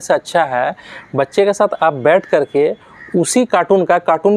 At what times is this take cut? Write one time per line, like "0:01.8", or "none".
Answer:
none